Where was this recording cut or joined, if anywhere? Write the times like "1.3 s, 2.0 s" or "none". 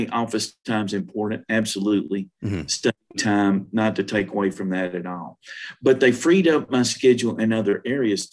none